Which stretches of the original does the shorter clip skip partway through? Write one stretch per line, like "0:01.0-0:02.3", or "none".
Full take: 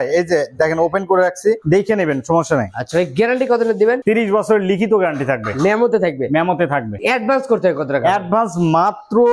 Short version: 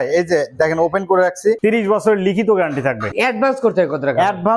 0:01.6-0:04.0
0:05.5-0:06.9